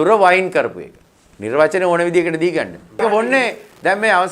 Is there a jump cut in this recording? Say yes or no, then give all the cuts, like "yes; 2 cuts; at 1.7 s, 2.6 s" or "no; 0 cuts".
yes; 1 cut; at 3.0 s